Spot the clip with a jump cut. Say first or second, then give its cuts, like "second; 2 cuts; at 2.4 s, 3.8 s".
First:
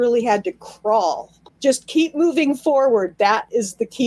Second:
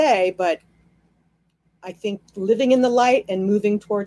first; 1 cut; at 1.4 s